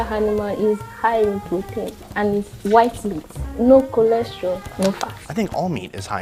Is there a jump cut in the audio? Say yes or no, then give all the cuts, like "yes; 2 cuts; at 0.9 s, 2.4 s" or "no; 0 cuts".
no; 0 cuts